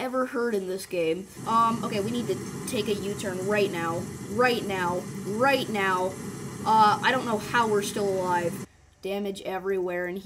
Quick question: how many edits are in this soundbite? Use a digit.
2